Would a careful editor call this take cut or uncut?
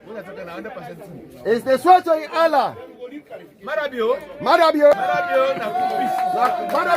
cut